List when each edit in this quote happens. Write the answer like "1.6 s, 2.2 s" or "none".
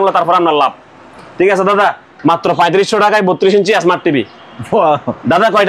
none

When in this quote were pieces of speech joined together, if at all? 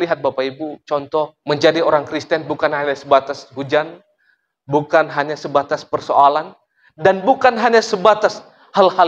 1.4 s

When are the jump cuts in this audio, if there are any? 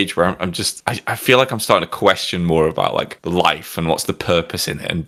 none

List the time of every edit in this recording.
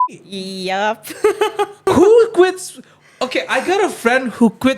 1.8 s

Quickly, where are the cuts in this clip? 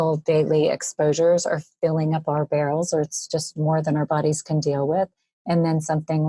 none

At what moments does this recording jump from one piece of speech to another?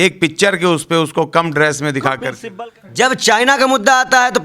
2.4 s

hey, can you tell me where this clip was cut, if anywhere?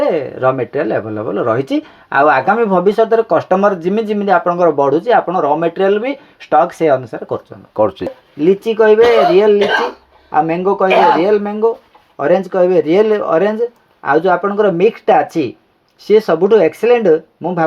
8.2 s

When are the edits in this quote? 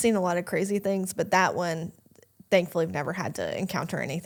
none

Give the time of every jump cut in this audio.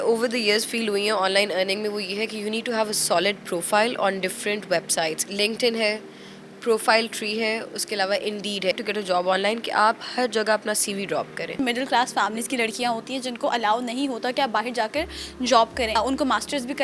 5.2 s, 8.7 s, 11.6 s, 16.0 s

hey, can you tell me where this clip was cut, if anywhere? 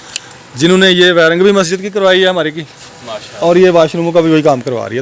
none

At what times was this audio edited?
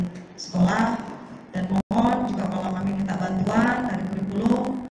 3.9 s

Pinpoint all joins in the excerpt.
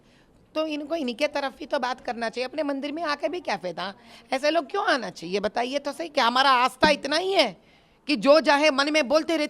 none

